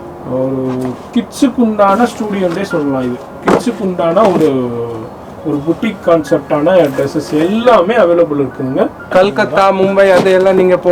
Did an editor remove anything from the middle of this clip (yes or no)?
yes